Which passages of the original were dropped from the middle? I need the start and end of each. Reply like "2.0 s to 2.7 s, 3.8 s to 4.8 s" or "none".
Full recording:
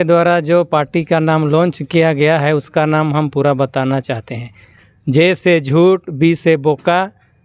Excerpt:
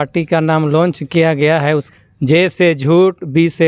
2.7 s to 4.7 s

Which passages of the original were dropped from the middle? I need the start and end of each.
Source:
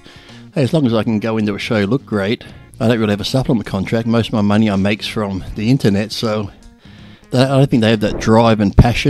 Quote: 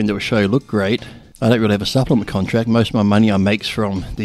none

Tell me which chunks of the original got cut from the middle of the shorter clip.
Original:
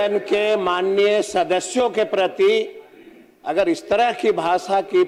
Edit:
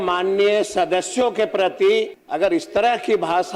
2.8 s to 3.4 s

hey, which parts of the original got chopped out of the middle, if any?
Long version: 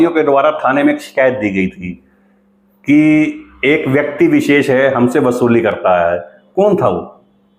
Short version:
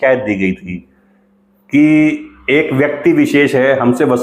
none

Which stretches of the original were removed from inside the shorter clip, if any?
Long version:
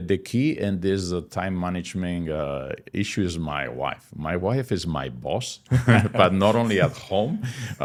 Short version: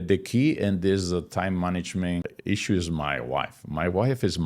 2.2 s to 2.7 s

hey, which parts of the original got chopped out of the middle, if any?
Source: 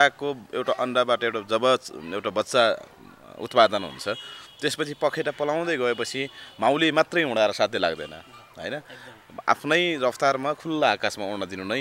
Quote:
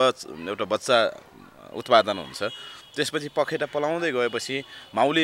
none

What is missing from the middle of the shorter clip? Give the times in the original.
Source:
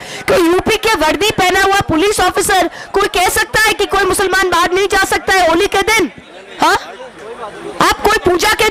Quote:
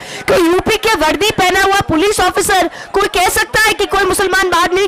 none

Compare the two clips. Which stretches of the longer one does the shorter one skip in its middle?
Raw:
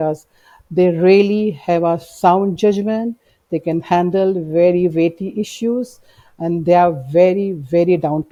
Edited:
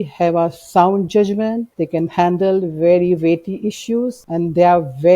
3.2 s to 3.4 s, 5.9 s to 6.3 s

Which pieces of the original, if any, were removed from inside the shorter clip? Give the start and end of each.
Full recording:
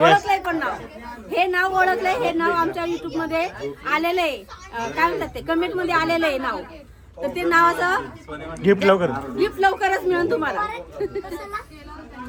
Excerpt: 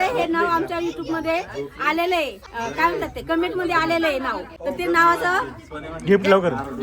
4.5 s to 4.7 s, 6.6 s to 7.0 s

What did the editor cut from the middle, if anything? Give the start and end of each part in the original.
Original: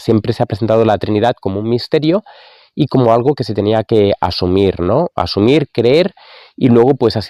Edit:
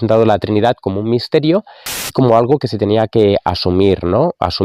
2.7 s to 2.9 s

